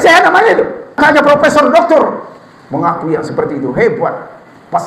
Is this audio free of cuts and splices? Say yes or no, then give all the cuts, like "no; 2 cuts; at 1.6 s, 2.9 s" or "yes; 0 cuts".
no; 1 cut; at 1.0 s